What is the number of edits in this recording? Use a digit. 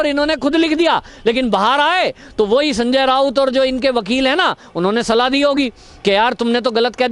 0